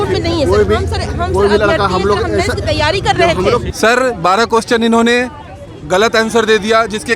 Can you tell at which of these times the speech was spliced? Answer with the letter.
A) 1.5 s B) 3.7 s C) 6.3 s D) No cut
B